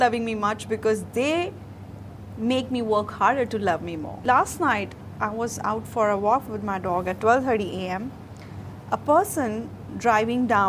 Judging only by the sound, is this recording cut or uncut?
cut